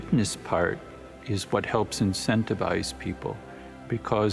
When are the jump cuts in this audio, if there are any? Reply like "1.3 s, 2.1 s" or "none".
none